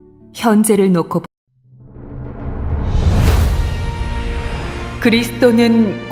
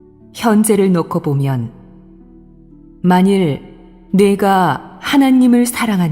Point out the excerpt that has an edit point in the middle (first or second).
second